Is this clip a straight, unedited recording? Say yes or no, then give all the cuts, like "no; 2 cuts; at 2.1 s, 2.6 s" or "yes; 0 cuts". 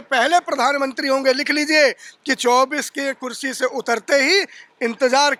yes; 0 cuts